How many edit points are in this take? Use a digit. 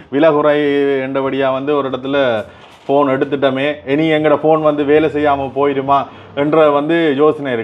0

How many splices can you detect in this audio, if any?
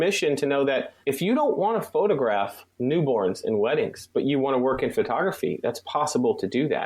2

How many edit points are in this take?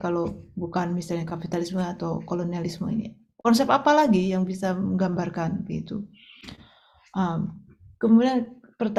0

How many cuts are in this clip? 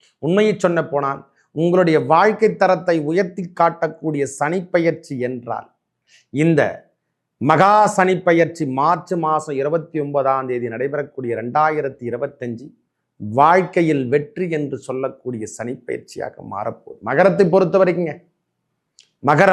0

